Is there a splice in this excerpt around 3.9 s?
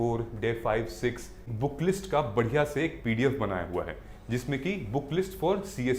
no; 1 cut; at 1.5 s

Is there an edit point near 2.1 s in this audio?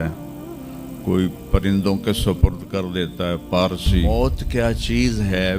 no; 1 cut; at 4.1 s

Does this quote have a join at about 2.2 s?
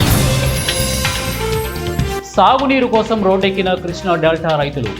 yes; 1 cut; at 2.2 s

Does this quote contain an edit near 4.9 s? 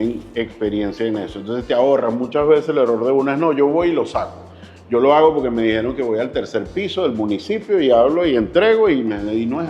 no; 0 cuts

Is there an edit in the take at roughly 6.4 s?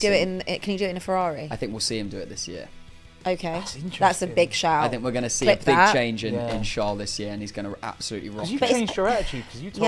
no; 0 cuts

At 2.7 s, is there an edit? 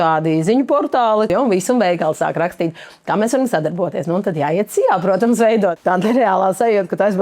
no; 2 cuts; at 1.3 s, 5.7 s

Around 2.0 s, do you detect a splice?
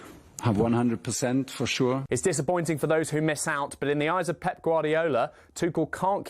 yes; 1 cut; at 2.0 s

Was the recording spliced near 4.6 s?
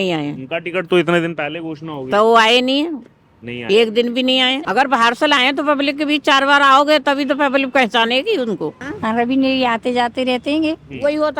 yes; 2 cuts; at 4.6 s, 8.9 s

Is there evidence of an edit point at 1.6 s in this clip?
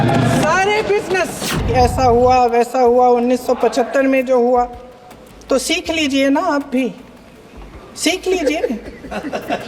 yes; 1 cut; at 1.6 s

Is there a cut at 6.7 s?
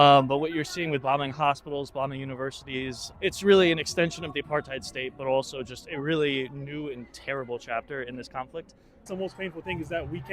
no; 2 cuts; at 3.1 s, 9.1 s

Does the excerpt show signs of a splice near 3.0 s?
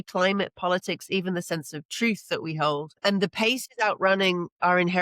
yes; 1 cut; at 3.0 s

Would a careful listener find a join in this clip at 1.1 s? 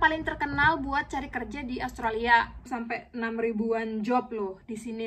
no; 1 cut; at 2.7 s

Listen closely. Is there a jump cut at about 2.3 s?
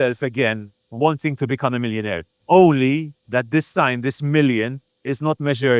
yes; 2 cuts; at 2.3 s, 3.2 s

